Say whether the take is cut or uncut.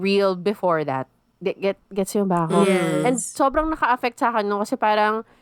uncut